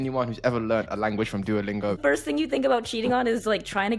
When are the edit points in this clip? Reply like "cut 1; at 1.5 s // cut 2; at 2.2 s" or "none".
cut 1; at 2.0 s